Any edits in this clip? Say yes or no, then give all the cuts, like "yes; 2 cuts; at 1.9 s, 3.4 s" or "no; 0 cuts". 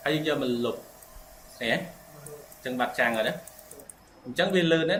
no; 0 cuts